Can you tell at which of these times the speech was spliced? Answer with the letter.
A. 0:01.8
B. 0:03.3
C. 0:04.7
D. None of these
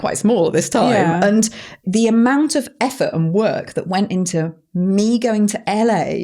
A